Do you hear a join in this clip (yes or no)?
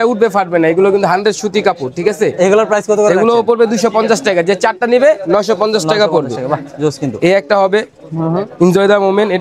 no